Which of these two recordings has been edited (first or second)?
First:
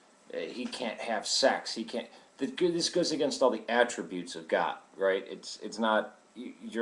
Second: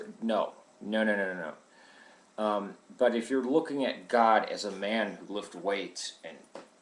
second